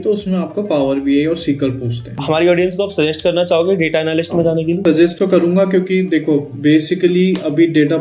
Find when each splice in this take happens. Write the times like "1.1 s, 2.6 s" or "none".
2.1 s, 5.1 s

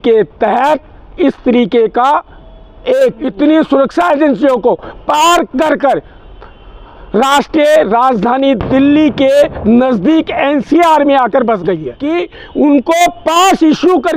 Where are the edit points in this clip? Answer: 3.2 s, 11.9 s

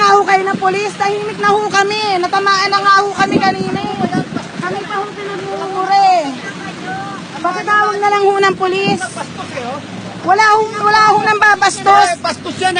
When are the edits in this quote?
none

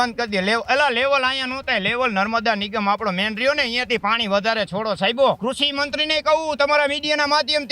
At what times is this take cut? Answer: 5.4 s

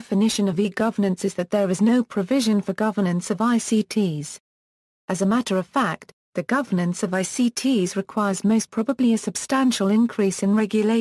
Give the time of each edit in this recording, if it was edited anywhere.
1.6 s

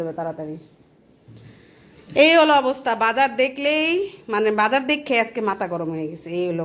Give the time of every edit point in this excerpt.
none

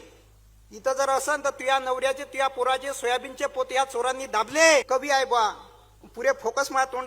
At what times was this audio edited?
4.9 s

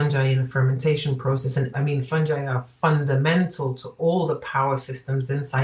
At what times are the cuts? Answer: 1.7 s

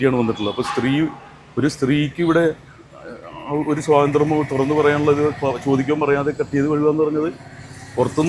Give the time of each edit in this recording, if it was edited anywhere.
none

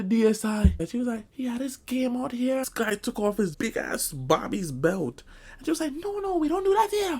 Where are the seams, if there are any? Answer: 0.9 s, 2.6 s, 3.5 s

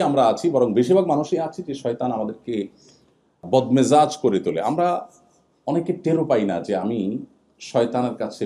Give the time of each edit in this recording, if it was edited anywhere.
3.4 s

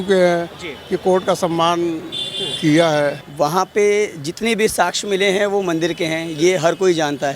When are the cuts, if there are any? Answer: 3.2 s

